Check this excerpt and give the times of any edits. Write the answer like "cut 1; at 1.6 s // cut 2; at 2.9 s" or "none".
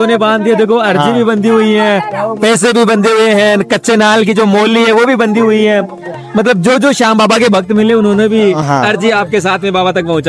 none

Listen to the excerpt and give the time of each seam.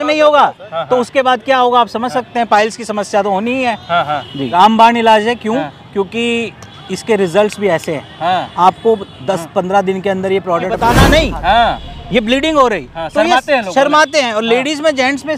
cut 1; at 4.3 s // cut 2; at 10.7 s

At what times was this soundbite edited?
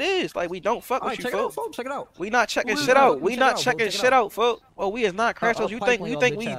cut 1; at 4.7 s

